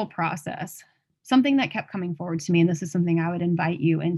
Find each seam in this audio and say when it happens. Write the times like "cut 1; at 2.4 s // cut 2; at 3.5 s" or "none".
cut 1; at 1.1 s

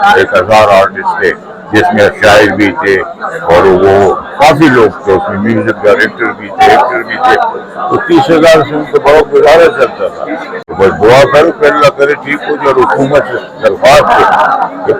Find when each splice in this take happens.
cut 1; at 10.6 s

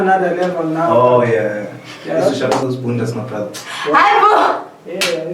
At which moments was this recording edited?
cut 1; at 2.4 s

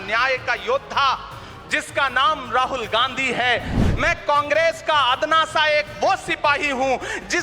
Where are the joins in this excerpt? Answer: cut 1; at 3.8 s

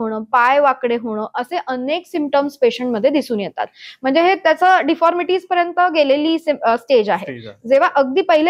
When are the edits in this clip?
none

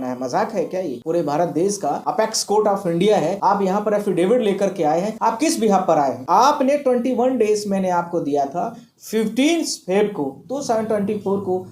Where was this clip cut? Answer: cut 1; at 1.0 s // cut 2; at 2.0 s // cut 3; at 3.4 s // cut 4; at 5.1 s // cut 5; at 6.2 s

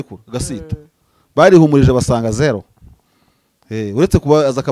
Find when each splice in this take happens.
none

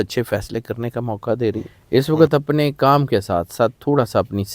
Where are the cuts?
cut 1; at 1.7 s

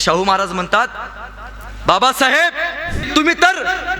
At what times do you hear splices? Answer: cut 1; at 3.0 s

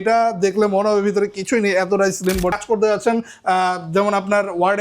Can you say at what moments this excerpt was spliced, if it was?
cut 1; at 2.5 s

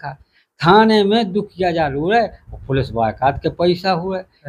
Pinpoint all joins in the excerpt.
none

